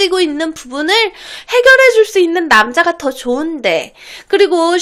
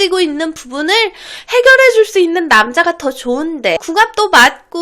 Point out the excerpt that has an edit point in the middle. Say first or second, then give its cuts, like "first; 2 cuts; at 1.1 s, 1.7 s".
second; 1 cut; at 3.8 s